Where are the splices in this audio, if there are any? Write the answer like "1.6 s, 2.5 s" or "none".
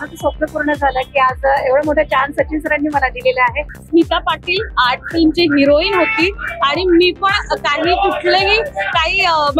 3.7 s